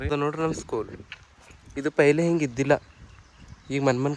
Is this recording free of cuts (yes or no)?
yes